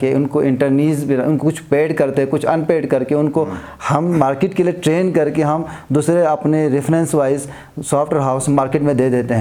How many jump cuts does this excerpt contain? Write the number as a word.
zero